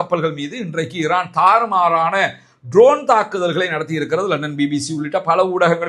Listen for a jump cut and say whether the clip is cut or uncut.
uncut